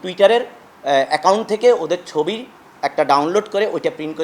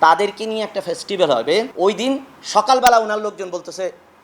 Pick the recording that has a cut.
second; 1 cut; at 1.7 s

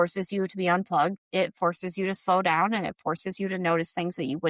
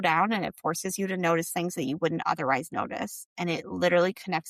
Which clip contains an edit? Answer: first; 1 cut; at 1.2 s

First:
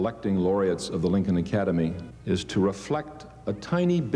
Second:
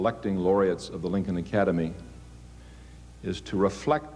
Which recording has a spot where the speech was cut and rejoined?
first; 1 cut; at 2.1 s

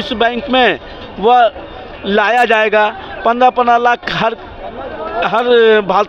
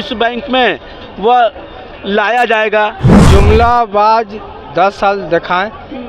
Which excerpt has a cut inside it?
second; 1 cut; at 3.1 s

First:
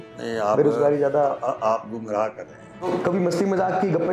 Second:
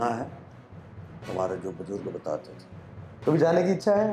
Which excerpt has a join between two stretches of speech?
first; 1 cut; at 2.7 s

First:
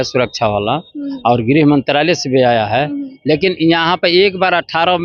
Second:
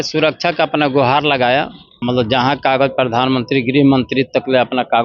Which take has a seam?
second; 1 cut; at 1.8 s

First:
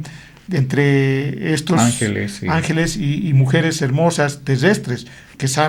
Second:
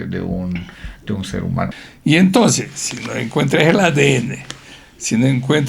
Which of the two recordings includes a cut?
second; 1 cut; at 1.8 s

